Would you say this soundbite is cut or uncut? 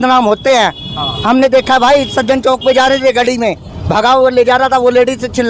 uncut